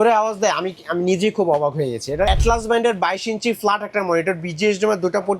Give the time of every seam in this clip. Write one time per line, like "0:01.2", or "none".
0:02.3

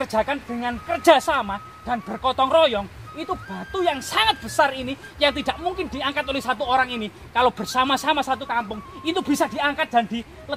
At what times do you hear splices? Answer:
none

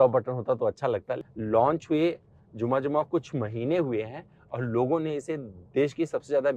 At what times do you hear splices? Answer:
0:01.2

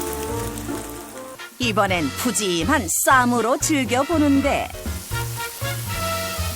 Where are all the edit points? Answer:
0:01.3

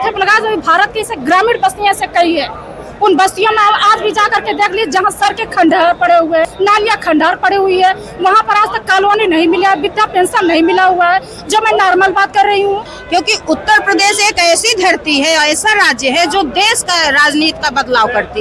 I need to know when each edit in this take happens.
0:06.5
0:12.9

